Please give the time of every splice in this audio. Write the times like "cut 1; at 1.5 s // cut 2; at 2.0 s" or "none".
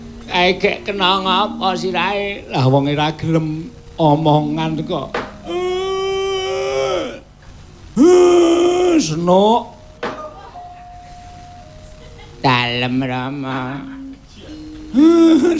none